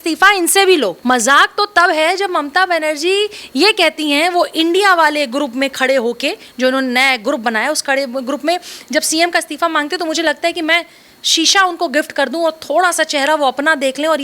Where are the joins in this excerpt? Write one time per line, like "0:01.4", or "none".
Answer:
0:01.0